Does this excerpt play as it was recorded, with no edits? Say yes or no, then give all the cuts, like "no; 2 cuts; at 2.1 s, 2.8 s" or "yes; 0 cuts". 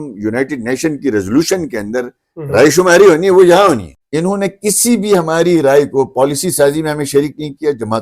no; 1 cut; at 4.0 s